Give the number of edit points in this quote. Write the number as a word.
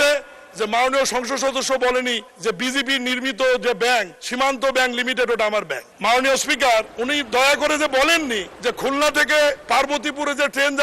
six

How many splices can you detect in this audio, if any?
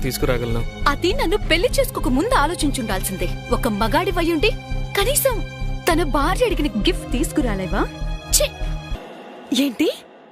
one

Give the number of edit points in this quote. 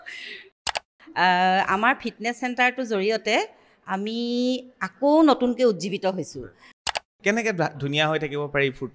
two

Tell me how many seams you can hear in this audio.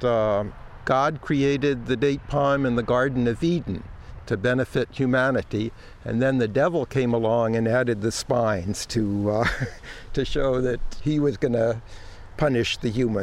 two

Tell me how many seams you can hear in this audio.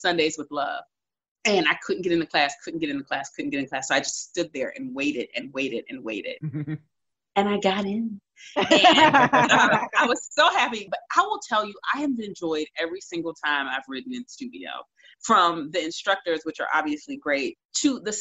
one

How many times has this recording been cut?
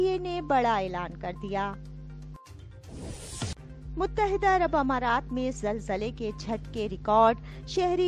one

